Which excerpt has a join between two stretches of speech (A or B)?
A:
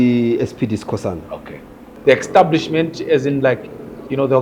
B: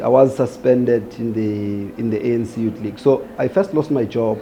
A